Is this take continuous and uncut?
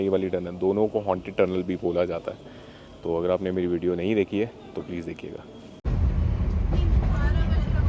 yes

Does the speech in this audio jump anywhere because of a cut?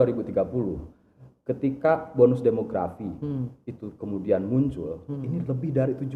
no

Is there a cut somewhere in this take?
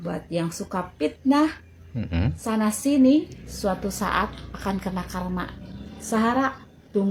no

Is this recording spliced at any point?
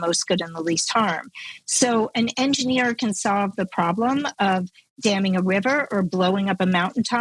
no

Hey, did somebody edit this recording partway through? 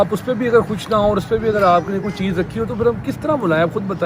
no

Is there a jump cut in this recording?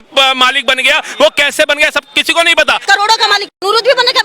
yes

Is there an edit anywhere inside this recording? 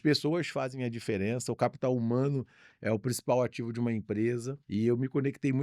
yes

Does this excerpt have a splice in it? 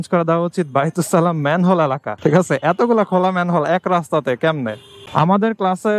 yes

